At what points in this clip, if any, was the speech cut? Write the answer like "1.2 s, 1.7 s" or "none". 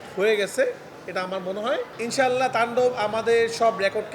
2.0 s